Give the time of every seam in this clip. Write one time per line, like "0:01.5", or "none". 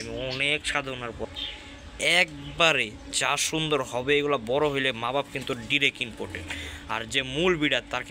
0:01.2